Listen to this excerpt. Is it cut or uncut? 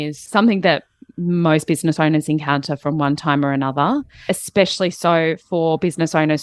uncut